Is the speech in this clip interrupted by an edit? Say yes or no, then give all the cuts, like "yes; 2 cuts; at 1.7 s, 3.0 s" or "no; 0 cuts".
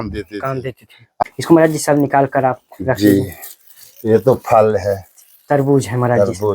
yes; 1 cut; at 1.2 s